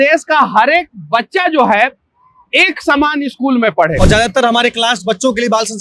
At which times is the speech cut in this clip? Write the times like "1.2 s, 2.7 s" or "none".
3.9 s